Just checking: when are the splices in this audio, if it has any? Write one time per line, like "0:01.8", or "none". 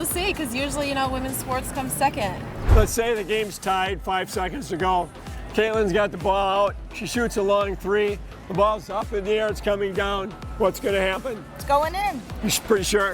0:02.6